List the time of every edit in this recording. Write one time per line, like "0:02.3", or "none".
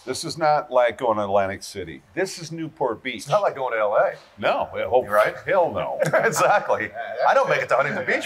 0:02.0